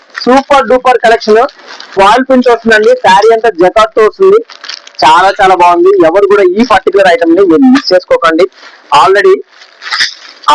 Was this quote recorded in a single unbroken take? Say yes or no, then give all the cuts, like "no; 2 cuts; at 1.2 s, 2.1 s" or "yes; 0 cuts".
yes; 0 cuts